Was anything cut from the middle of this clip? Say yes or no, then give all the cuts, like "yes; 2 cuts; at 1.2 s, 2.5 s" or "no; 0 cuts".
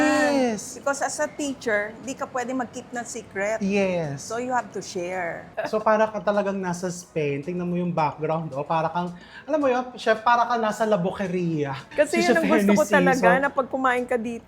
yes; 2 cuts; at 5.4 s, 11.8 s